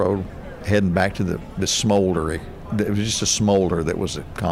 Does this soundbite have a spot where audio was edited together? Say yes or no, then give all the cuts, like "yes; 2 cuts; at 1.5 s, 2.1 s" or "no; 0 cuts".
no; 0 cuts